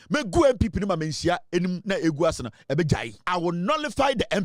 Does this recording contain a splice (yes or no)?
yes